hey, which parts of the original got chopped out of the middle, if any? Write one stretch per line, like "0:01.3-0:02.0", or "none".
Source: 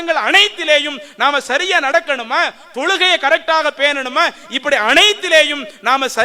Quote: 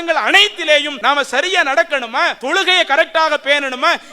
0:00.9-0:01.1
0:02.6-0:02.7